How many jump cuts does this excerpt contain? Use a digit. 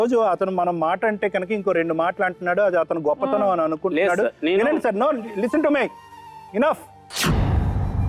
1